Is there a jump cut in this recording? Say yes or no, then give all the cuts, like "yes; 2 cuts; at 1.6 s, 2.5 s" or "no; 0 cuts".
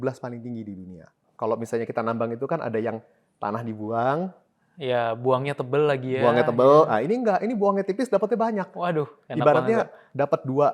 yes; 1 cut; at 1.2 s